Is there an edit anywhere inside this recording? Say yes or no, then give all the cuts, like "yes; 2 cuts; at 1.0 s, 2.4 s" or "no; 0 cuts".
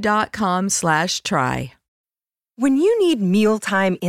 yes; 1 cut; at 1.8 s